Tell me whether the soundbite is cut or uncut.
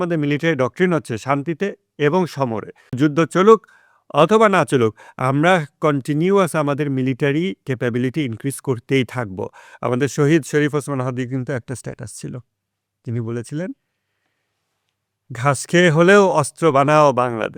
uncut